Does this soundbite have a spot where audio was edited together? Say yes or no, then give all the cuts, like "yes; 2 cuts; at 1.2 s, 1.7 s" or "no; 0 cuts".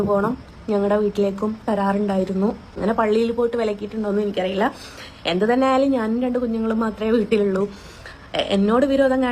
yes; 1 cut; at 2.7 s